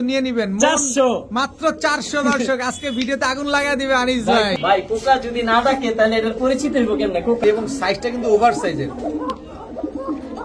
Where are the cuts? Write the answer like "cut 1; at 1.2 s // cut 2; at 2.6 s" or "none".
cut 1; at 4.5 s // cut 2; at 7.4 s